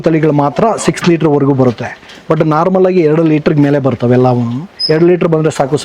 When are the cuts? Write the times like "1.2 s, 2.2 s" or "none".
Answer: none